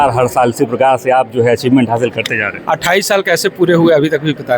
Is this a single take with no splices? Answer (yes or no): yes